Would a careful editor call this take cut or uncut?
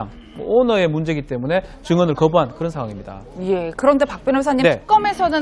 uncut